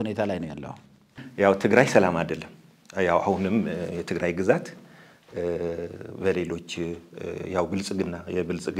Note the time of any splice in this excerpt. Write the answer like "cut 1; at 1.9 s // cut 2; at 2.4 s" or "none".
cut 1; at 1.3 s